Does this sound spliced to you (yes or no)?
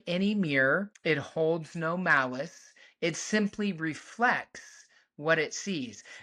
yes